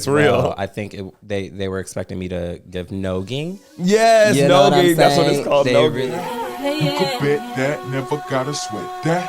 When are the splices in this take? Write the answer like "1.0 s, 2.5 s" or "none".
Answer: 6.1 s